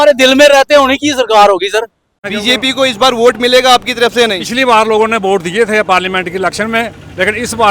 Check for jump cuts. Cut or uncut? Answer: cut